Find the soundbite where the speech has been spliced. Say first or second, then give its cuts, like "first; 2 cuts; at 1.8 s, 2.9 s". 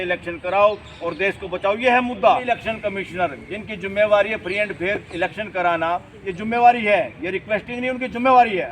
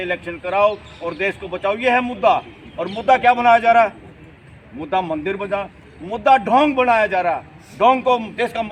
first; 1 cut; at 2.5 s